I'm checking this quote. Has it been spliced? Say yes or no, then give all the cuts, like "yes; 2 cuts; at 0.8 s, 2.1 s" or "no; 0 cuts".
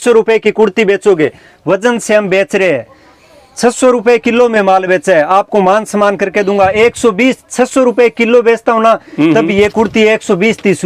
no; 0 cuts